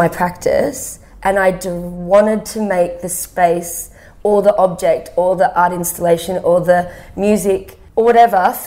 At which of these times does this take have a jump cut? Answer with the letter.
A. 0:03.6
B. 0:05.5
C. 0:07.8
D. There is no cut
C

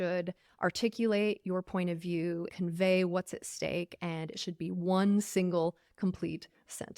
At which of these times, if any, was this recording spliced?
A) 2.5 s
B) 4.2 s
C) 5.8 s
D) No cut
A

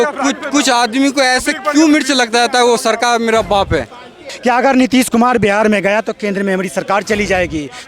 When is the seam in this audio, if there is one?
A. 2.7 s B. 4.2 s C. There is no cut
B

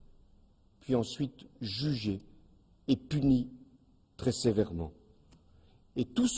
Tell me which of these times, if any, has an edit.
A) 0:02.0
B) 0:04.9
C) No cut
C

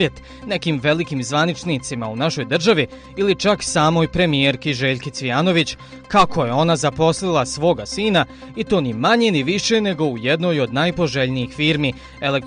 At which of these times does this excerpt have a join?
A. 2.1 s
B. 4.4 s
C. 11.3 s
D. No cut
C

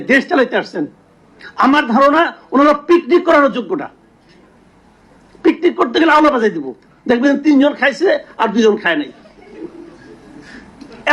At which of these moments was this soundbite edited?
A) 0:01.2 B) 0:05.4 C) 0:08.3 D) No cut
D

